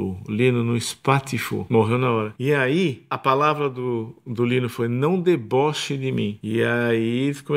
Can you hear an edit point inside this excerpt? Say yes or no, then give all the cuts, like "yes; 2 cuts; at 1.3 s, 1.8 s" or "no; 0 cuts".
yes; 4 cuts; at 1.6 s, 2.3 s, 3.2 s, 6.4 s